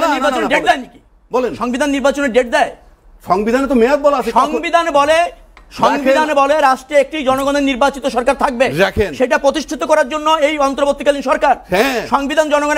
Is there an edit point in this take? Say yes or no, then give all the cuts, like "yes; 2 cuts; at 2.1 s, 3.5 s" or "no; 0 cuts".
no; 0 cuts